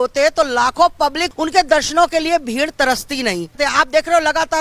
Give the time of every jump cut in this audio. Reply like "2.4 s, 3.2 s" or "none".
1.2 s, 3.6 s

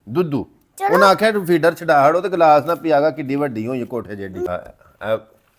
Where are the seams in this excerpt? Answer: 4.5 s

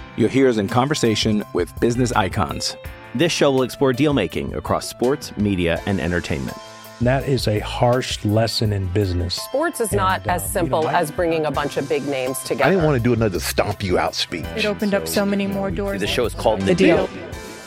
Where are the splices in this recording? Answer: none

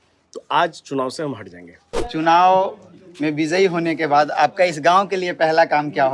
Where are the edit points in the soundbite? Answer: 2.0 s

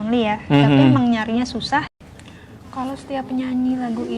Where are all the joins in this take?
1.9 s

